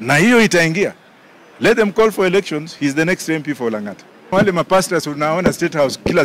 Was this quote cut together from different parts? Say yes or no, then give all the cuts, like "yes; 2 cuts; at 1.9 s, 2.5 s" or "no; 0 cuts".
yes; 1 cut; at 4.3 s